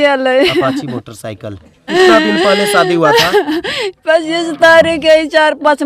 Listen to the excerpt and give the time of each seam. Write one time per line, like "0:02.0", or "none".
0:01.9